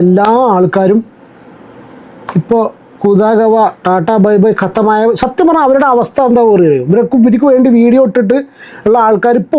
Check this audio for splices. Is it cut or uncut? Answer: uncut